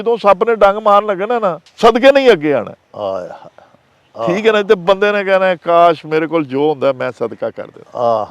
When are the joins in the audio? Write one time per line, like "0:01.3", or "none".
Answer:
0:01.6